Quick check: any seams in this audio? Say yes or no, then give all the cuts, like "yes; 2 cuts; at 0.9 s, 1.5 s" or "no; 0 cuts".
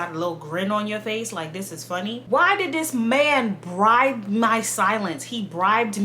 yes; 1 cut; at 2.2 s